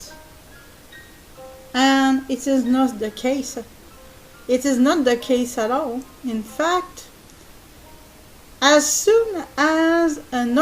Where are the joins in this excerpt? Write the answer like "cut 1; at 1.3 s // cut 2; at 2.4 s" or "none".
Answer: cut 1; at 6.2 s